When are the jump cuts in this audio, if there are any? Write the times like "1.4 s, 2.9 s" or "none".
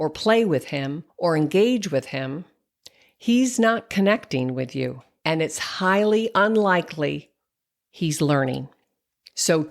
1.0 s, 5.1 s